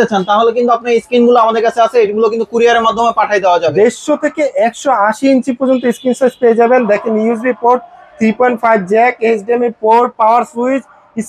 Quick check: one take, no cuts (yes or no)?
no